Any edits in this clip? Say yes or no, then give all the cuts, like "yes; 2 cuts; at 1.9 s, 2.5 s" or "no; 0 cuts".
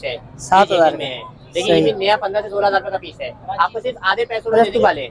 no; 0 cuts